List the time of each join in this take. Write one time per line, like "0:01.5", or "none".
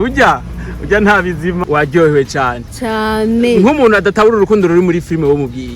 0:01.6